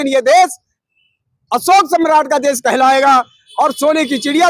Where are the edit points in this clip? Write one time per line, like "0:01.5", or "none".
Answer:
none

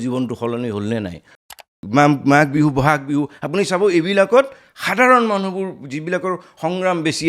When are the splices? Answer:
0:01.5

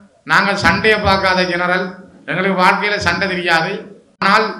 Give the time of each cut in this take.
none

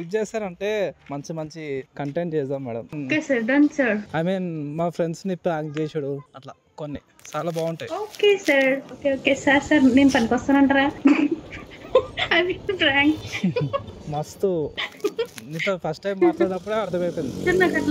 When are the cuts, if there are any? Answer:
0:02.9

